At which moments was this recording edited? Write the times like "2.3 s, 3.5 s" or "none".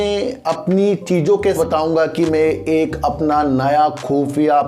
1.6 s